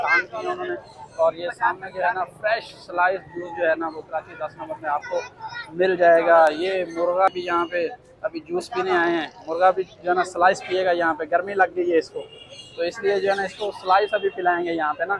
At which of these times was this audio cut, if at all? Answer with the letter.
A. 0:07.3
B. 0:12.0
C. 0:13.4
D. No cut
A